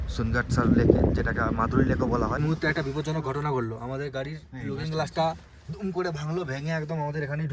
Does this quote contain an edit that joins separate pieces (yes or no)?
yes